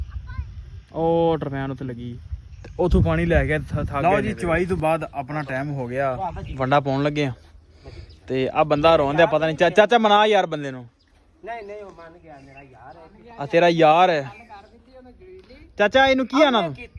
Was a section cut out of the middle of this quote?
yes; 1 cut; at 4.0 s

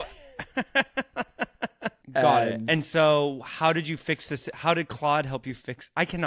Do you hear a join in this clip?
yes; 1 cut; at 1.9 s

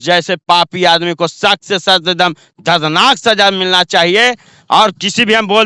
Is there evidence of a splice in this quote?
no; 0 cuts

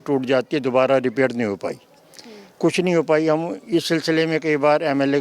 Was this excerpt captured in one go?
yes; 0 cuts

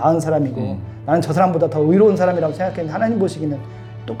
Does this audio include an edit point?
no; 0 cuts

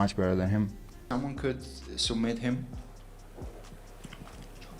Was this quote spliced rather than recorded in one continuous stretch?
yes; 1 cut; at 1.1 s

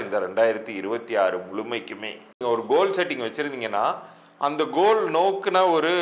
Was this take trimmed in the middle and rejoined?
yes; 1 cut; at 2.4 s

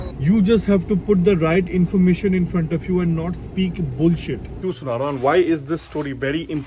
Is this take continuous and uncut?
no; 1 cut; at 4.5 s

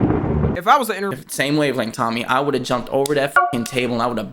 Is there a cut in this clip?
yes; 1 cut; at 1.2 s

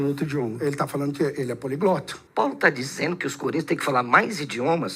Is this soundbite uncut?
no; 1 cut; at 2.2 s

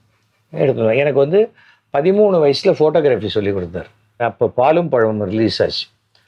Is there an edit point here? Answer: yes; 1 cut; at 4.2 s

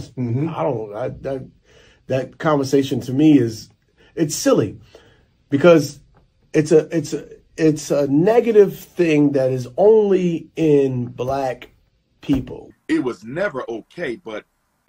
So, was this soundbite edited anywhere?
yes; 1 cut; at 12.6 s

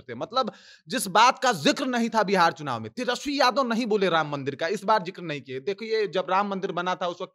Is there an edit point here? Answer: no; 0 cuts

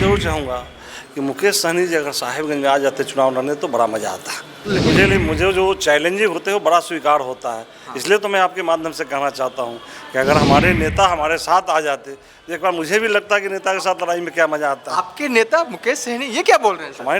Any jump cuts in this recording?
yes; 1 cut; at 4.8 s

